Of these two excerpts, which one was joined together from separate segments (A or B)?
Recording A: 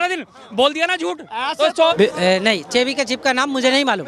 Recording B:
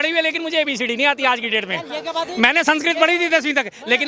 A